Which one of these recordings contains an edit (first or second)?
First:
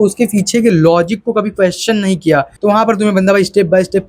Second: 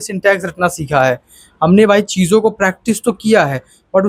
first